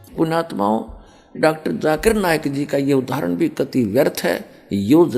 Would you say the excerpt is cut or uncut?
cut